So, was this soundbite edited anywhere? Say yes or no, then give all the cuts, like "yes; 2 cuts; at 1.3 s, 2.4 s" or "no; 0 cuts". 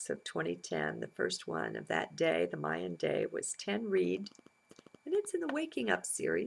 no; 0 cuts